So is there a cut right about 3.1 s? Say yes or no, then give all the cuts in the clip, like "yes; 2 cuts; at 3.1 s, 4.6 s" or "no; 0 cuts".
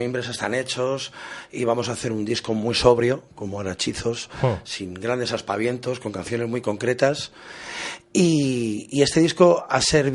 no; 1 cut; at 4.4 s